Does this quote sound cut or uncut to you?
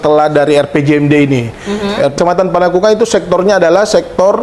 cut